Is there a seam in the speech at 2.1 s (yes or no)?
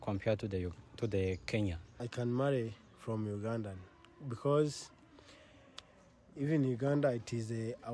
yes